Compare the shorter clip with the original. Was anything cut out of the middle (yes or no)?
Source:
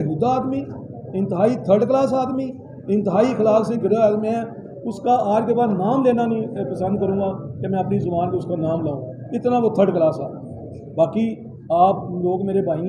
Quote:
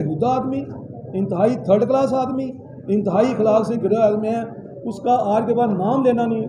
no